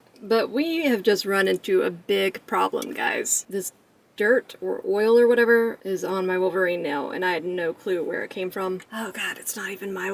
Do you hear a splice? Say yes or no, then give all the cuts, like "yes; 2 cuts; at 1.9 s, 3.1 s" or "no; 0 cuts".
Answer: yes; 3 cuts; at 3.4 s, 5.8 s, 8.9 s